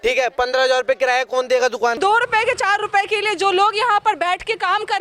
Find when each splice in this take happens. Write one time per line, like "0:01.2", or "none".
0:02.0

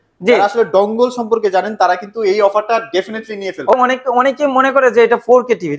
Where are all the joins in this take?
0:03.7

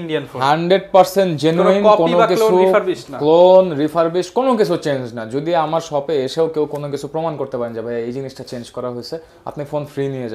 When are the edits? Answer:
none

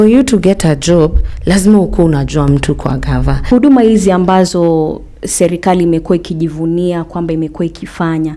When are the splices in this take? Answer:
0:03.5

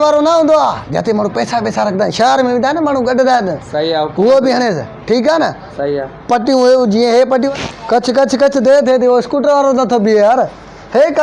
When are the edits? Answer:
0:07.5

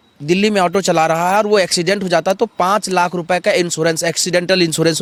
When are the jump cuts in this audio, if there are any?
none

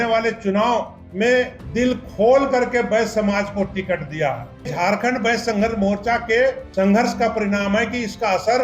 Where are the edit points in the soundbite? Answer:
0:01.0
0:01.6
0:04.7
0:06.6

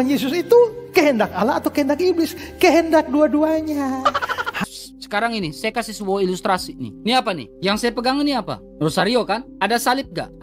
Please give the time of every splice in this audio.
0:04.6

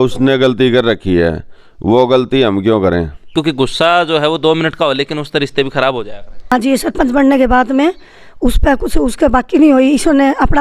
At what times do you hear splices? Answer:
0:03.2
0:06.5

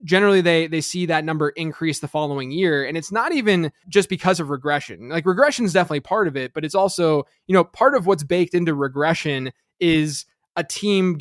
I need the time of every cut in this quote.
0:03.8

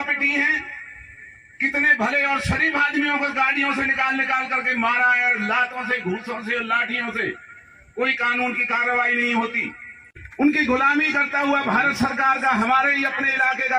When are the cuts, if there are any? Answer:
0:10.2

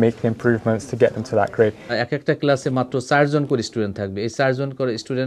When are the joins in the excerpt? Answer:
0:01.9

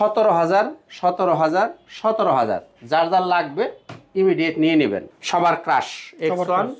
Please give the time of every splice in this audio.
0:05.1

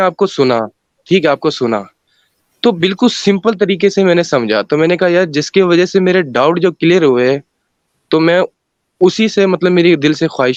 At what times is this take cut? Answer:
none

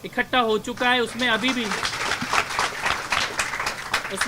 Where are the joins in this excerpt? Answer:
none

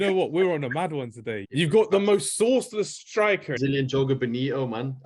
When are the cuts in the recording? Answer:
0:01.4
0:03.5

